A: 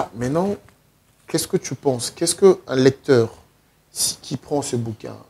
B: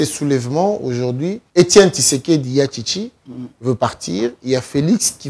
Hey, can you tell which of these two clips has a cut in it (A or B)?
B